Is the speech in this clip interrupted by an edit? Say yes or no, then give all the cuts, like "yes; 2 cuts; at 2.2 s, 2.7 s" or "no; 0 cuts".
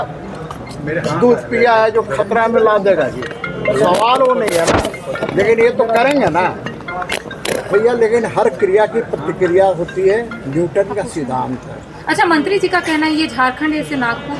no; 0 cuts